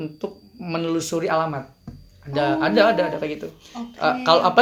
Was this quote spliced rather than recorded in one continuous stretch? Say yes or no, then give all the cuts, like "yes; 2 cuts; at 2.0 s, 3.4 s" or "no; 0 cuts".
no; 0 cuts